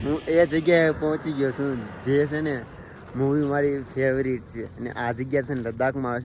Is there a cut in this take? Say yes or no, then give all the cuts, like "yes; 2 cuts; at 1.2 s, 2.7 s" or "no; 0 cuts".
no; 0 cuts